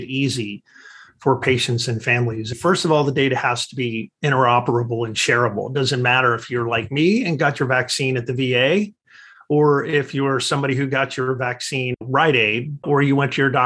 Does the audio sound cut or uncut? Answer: cut